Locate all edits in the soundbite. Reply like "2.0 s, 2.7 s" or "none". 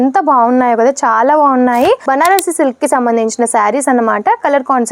2.1 s